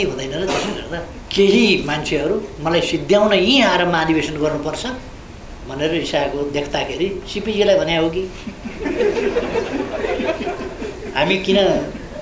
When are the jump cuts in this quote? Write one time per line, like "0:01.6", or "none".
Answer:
0:01.2